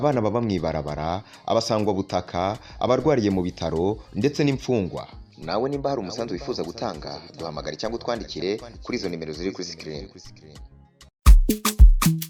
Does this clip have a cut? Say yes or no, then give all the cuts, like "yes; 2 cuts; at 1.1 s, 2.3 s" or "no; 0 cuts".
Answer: no; 0 cuts